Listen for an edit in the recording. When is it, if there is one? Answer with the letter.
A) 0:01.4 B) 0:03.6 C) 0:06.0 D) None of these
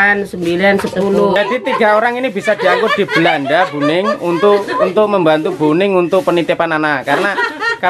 A